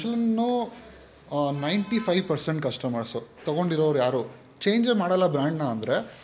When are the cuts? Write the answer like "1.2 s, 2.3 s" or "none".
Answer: none